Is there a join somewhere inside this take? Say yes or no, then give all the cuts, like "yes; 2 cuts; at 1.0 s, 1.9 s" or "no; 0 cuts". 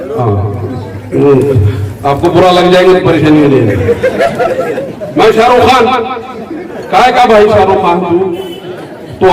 yes; 1 cut; at 4.9 s